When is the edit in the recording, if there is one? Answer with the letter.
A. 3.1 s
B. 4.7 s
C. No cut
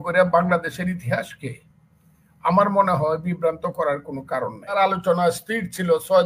B